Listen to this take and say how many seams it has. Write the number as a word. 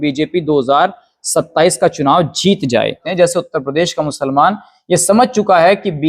one